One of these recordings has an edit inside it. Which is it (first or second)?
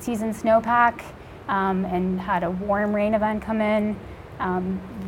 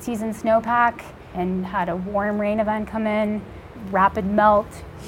second